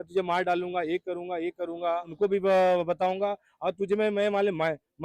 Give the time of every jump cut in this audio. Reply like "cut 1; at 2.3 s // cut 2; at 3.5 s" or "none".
cut 1; at 2.1 s